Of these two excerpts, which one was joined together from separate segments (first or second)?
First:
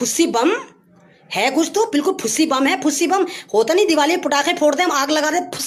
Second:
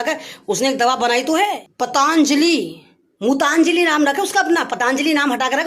second